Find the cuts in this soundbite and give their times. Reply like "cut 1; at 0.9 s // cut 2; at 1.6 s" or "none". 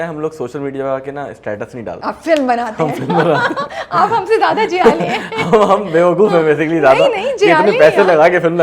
cut 1; at 2.0 s